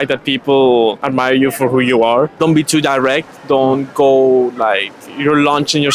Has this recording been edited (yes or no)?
yes